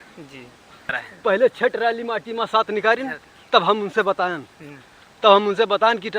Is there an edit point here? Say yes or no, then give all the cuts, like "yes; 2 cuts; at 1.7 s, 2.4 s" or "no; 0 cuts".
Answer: yes; 1 cut; at 1.1 s